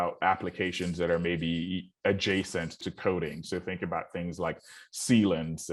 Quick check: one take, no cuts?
yes; 0 cuts

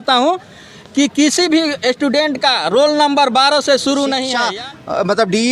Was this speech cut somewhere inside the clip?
yes; 1 cut; at 4.3 s

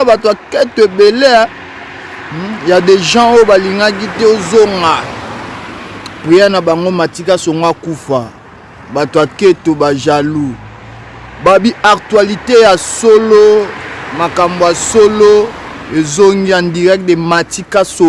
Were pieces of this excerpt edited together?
no; 0 cuts

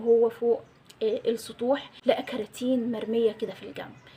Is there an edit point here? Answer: no; 0 cuts

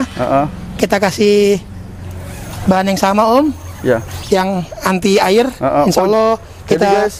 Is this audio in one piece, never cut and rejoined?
yes; 0 cuts

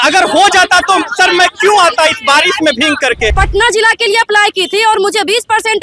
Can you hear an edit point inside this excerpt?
yes; 1 cut; at 3.3 s

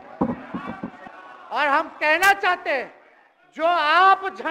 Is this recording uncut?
no; 1 cut; at 1.0 s

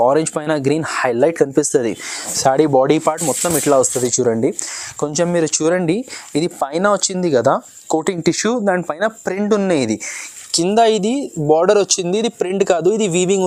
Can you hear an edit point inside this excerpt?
no; 0 cuts

